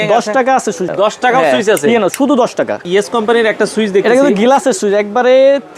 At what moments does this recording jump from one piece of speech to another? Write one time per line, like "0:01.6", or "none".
0:00.9
0:02.8